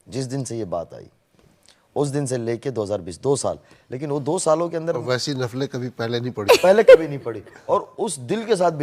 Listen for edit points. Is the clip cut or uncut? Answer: uncut